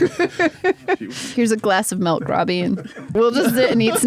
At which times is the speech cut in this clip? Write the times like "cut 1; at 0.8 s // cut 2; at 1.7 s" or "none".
cut 1; at 1.1 s // cut 2; at 3.0 s